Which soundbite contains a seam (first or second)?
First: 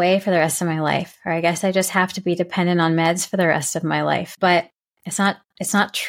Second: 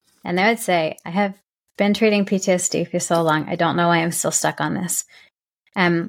first